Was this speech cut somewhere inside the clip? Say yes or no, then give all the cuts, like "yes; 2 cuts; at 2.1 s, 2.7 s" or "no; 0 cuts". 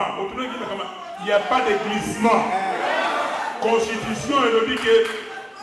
no; 0 cuts